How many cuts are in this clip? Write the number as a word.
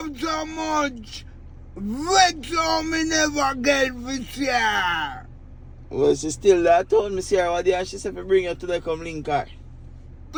zero